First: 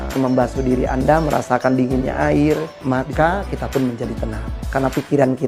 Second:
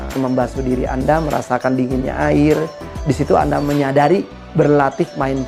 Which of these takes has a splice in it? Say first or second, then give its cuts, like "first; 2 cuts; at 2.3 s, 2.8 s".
first; 1 cut; at 2.7 s